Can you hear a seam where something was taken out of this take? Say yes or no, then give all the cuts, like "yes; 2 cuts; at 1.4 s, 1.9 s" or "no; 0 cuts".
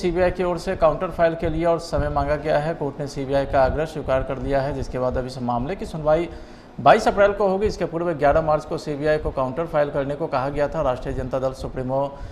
no; 0 cuts